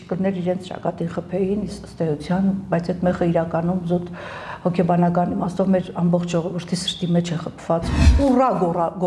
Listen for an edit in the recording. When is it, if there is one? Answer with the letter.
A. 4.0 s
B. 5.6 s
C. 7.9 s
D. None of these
C